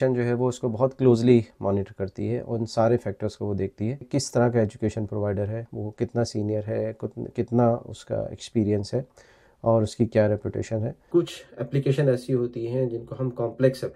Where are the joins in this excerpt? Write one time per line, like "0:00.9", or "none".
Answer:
0:04.1
0:11.1